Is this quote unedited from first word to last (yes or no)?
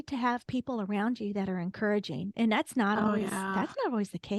yes